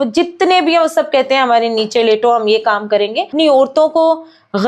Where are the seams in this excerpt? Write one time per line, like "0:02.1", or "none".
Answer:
0:03.3